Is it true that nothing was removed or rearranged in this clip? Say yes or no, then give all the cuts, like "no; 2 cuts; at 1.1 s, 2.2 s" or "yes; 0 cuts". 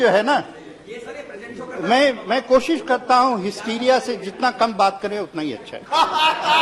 yes; 0 cuts